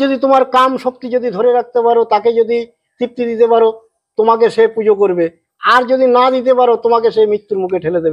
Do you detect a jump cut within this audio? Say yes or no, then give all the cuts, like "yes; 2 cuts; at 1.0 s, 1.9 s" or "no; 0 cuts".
no; 0 cuts